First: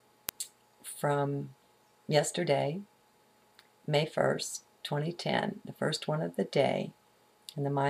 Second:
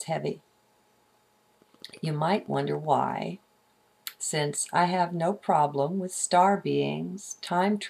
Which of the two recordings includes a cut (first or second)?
first